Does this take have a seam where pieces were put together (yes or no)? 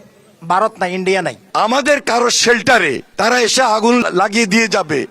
yes